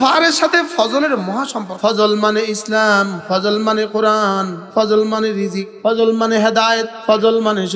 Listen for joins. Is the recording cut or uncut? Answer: cut